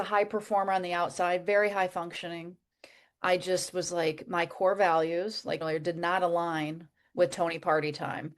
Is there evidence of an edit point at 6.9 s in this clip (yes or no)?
no